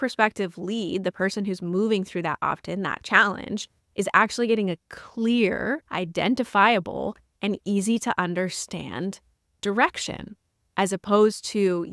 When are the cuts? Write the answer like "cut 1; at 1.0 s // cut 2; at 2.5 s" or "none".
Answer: none